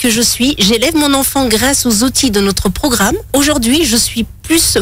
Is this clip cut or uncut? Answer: cut